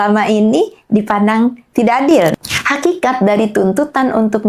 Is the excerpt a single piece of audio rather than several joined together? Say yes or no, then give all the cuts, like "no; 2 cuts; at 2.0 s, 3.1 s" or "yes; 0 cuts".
no; 1 cut; at 2.3 s